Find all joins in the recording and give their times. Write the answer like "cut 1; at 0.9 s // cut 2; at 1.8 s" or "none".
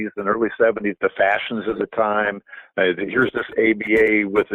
cut 1; at 1.0 s

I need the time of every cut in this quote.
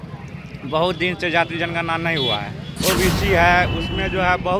cut 1; at 2.7 s

